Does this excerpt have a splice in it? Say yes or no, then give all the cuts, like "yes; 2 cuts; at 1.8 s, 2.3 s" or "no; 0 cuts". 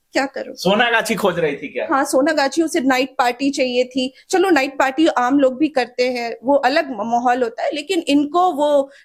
no; 0 cuts